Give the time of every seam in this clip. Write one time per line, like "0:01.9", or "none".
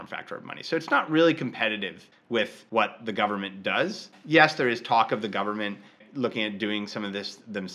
0:02.4
0:04.1
0:06.0

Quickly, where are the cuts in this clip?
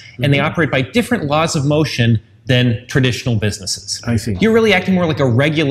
0:04.3

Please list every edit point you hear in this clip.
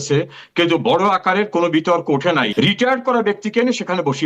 0:02.5

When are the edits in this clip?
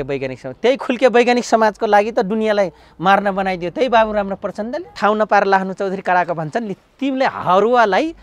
0:04.9

